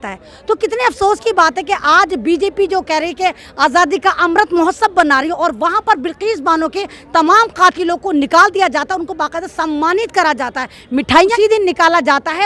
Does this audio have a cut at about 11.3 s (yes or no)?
yes